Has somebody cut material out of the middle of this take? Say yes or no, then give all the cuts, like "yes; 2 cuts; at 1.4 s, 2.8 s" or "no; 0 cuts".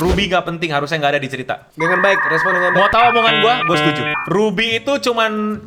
no; 0 cuts